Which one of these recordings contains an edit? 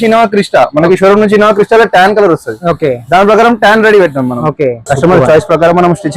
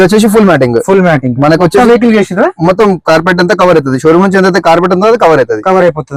first; 1 cut; at 4.9 s

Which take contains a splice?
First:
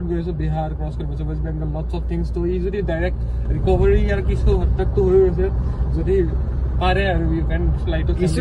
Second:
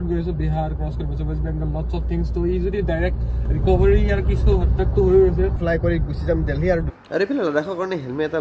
second; 2 cuts; at 5.6 s, 6.9 s

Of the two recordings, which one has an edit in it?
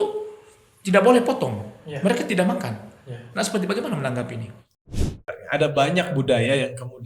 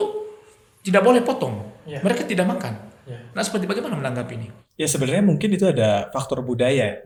first; 1 cut; at 5.0 s

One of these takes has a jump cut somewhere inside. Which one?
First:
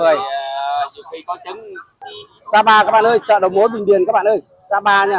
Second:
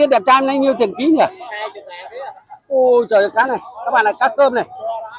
first; 1 cut; at 2.0 s

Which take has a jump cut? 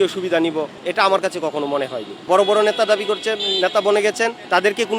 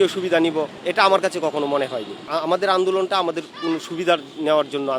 first; 1 cut; at 2.1 s

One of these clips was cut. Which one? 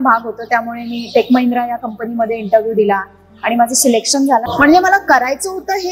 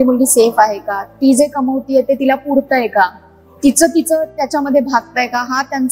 first; 1 cut; at 4.4 s

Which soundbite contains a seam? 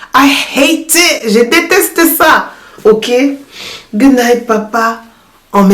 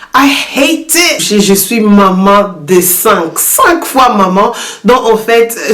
second; 1 cut; at 1.2 s

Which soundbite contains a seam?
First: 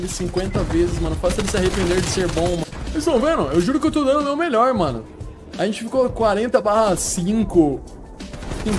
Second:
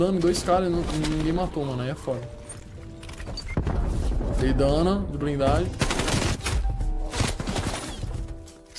first; 1 cut; at 2.7 s

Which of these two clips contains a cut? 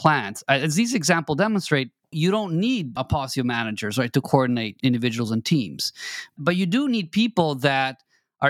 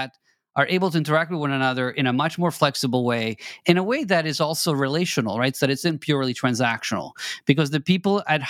first; 4 cuts; at 2.1 s, 3.0 s, 4.7 s, 6.3 s

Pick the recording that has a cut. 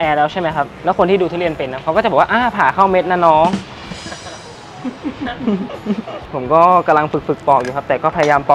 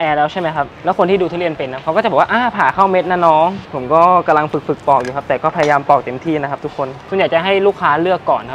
second; 2 cuts; at 3.7 s, 7.0 s

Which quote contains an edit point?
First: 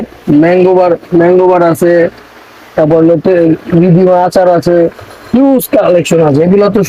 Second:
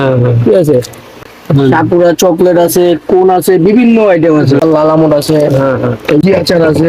second; 3 cuts; at 1.2 s, 4.6 s, 6.2 s

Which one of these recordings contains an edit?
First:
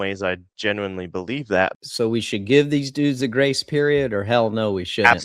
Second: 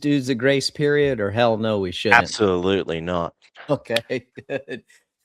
first; 1 cut; at 1.7 s

